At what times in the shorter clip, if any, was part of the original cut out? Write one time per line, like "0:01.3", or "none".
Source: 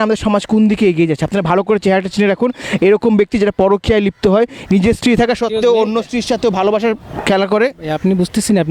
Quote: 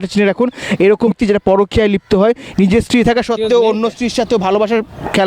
0:01.1